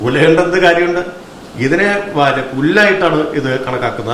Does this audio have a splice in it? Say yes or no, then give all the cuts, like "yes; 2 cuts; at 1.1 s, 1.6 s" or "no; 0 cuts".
no; 0 cuts